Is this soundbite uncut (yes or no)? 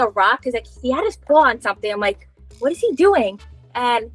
yes